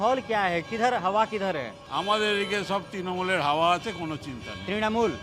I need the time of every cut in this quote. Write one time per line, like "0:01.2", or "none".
0:01.8